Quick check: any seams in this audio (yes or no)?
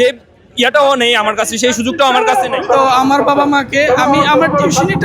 yes